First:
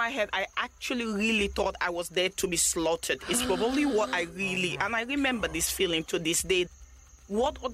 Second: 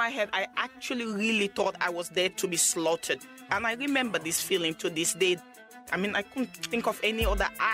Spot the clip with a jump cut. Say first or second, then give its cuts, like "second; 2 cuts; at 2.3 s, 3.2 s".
second; 2 cuts; at 3.3 s, 5.9 s